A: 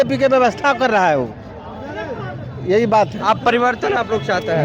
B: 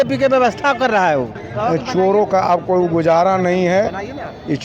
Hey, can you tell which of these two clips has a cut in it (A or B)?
B